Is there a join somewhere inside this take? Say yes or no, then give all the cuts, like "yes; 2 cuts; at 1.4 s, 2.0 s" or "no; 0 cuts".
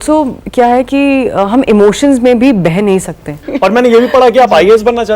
yes; 1 cut; at 3.5 s